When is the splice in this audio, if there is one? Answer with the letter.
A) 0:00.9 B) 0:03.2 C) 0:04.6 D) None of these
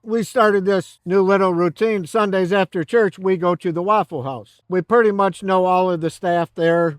C